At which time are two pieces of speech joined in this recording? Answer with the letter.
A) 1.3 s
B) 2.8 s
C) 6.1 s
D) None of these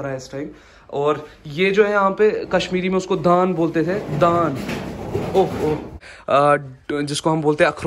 C